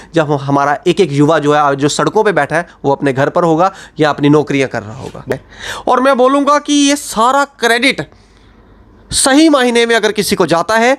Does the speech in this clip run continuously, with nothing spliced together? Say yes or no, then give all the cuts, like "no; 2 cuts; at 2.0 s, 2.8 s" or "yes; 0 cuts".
no; 1 cut; at 5.2 s